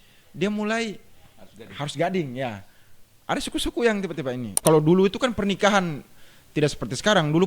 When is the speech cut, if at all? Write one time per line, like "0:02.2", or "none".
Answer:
0:04.6